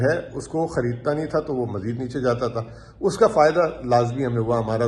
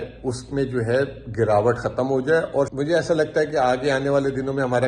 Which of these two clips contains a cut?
second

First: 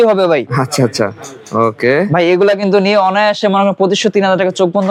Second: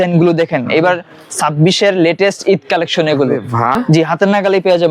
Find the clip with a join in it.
second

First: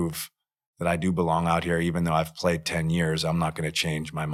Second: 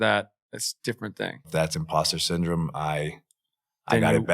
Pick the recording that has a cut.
second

